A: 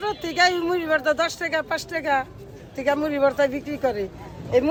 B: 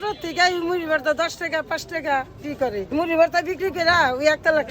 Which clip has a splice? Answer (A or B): B